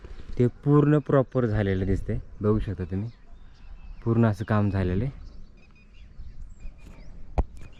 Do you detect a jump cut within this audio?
no; 0 cuts

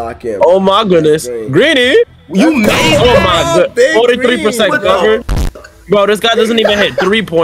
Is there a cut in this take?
no; 0 cuts

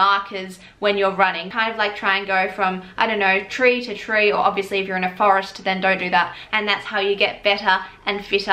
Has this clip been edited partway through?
yes; 2 cuts; at 1.5 s, 6.4 s

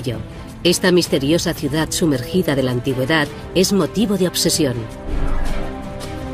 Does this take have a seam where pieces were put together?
yes; 1 cut; at 1.2 s

